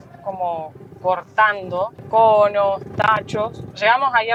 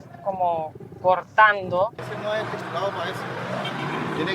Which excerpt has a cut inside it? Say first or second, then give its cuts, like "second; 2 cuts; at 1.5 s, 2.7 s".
second; 1 cut; at 2.0 s